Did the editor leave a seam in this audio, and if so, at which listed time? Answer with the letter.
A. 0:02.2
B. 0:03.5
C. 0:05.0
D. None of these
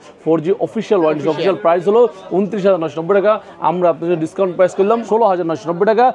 C